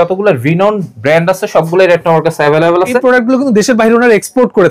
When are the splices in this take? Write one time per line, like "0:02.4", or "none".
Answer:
0:03.0